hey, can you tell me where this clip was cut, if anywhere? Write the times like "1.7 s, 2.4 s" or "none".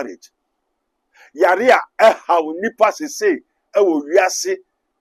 none